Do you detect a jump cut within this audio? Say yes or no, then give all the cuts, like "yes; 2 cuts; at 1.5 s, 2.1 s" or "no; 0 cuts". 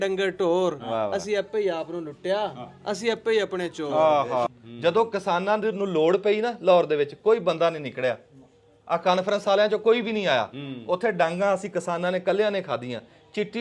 yes; 1 cut; at 4.5 s